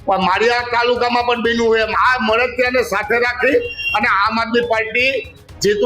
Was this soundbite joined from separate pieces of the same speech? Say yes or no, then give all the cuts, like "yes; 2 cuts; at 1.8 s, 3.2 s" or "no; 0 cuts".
yes; 1 cut; at 1.9 s